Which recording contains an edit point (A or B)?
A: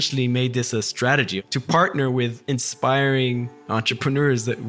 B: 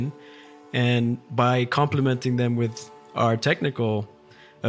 A